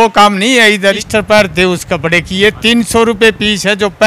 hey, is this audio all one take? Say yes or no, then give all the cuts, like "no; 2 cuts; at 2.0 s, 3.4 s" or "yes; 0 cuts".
no; 1 cut; at 1.0 s